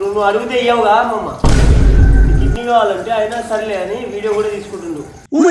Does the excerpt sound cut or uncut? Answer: uncut